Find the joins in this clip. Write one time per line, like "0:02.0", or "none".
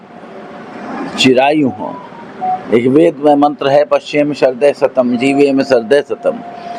none